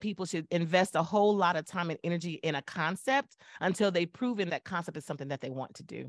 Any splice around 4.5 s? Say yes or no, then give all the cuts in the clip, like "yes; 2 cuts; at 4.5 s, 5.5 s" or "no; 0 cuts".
yes; 1 cut; at 4.5 s